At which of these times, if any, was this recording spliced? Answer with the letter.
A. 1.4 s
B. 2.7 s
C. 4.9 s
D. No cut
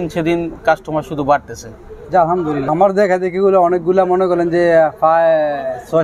B